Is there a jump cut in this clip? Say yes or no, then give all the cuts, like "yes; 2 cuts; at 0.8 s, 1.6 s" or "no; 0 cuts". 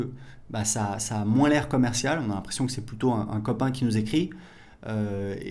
no; 0 cuts